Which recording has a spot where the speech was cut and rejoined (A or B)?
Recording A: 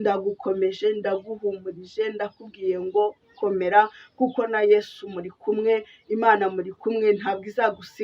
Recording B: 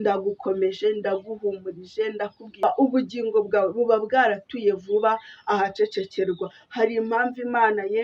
B